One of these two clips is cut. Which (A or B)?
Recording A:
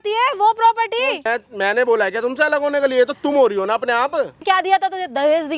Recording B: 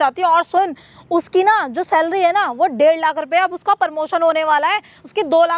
A